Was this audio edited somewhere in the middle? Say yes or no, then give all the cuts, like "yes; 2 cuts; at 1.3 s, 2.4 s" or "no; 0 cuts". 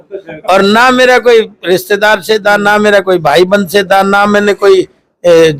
no; 0 cuts